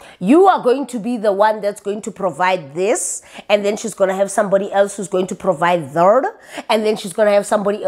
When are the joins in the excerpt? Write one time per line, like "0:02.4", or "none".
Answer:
none

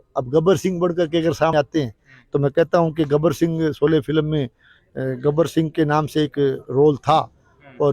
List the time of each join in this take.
0:01.5

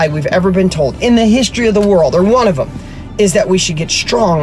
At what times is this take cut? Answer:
none

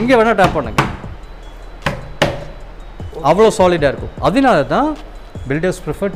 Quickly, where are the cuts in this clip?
none

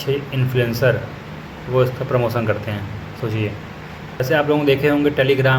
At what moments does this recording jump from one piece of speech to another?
0:04.2

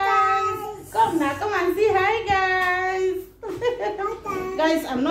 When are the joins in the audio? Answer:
none

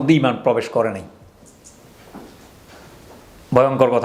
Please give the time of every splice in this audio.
none

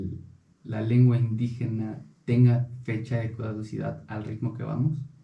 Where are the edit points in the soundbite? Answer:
none

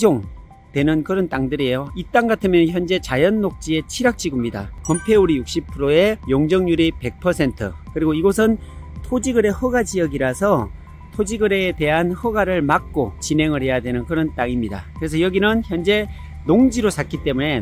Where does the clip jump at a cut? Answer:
0:01.9
0:04.7

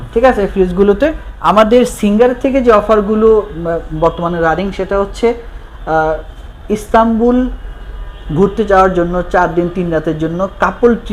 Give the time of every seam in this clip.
0:01.3

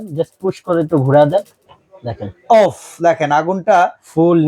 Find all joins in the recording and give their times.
none

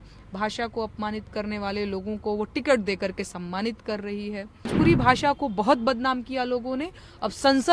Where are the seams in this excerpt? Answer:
0:04.7

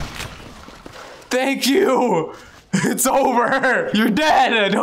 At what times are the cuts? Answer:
0:03.9

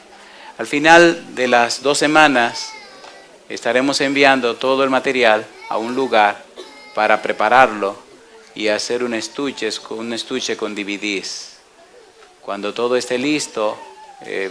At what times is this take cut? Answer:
none

